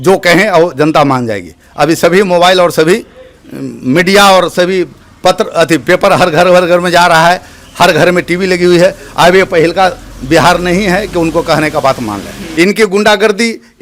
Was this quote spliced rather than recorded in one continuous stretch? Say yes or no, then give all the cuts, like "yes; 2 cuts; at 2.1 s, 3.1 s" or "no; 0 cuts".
yes; 1 cut; at 12.4 s